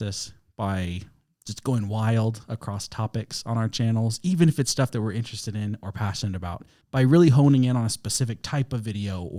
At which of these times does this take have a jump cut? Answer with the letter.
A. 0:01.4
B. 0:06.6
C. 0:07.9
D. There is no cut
D